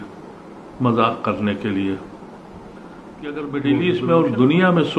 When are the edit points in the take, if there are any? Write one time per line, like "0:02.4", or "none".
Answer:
0:03.4